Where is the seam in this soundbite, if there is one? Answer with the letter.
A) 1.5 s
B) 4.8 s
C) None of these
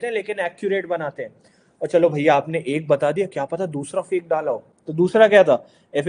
B